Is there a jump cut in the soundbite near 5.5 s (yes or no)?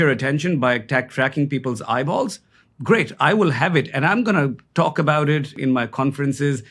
yes